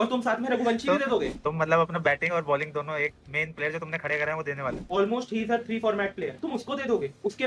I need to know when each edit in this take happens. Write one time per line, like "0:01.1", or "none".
0:01.3
0:04.8
0:06.4